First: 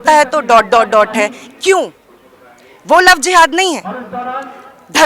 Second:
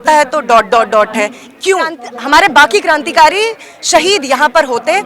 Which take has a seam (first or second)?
second